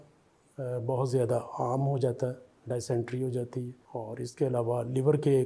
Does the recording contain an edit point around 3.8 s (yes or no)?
yes